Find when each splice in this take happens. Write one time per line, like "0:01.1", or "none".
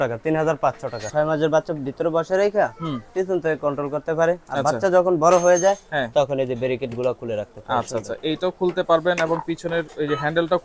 0:01.0

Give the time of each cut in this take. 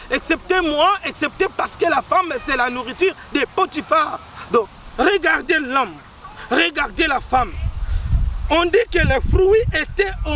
0:04.7

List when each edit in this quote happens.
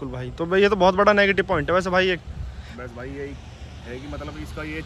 none

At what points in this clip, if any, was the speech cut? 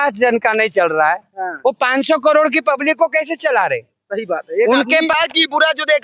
0:05.2

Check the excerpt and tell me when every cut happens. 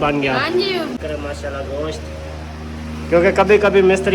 0:01.0

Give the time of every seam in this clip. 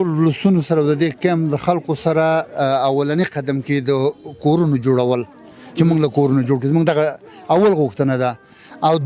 none

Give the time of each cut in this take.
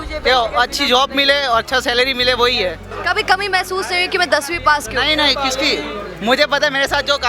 0:02.9

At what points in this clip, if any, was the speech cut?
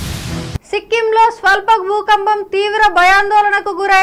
none

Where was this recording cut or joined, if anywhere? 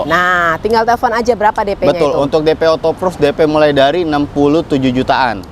none

